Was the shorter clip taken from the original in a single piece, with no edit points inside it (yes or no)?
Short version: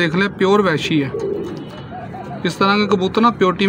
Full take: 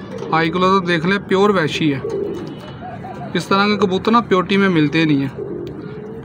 yes